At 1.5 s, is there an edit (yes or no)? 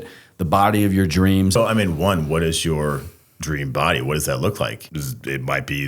yes